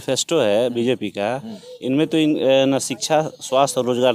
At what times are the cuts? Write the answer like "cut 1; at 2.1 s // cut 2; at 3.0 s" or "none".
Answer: none